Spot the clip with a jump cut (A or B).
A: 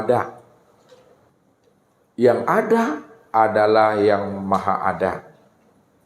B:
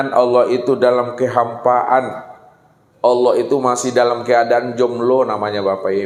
A